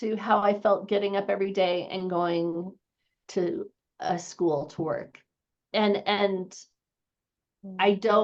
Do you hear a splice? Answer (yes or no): no